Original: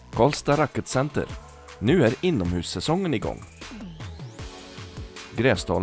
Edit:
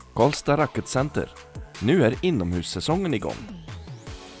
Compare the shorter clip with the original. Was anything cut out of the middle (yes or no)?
yes